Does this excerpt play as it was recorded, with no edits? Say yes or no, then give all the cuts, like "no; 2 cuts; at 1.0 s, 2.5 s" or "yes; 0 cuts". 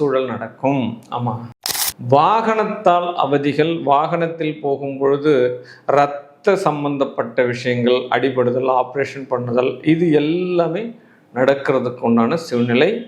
no; 1 cut; at 1.6 s